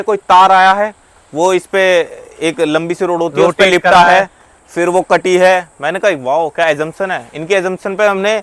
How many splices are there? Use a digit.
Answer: 0